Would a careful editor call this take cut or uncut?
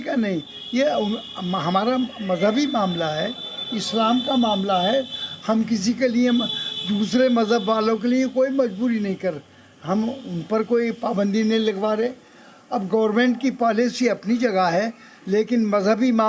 uncut